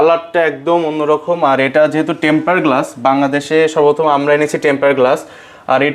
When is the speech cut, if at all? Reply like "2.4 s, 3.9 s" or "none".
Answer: none